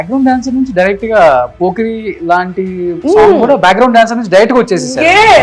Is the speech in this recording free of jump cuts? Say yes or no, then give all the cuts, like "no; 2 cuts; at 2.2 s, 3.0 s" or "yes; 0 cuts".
yes; 0 cuts